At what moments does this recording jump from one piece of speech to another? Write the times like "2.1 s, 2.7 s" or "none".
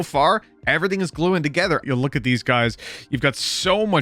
1.8 s